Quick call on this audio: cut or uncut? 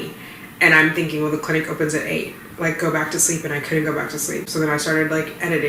uncut